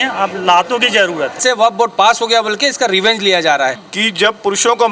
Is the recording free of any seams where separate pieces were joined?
no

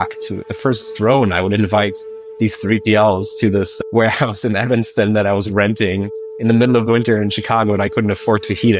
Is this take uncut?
yes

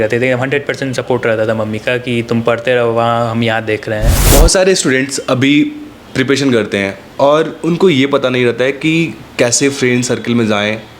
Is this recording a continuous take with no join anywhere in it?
no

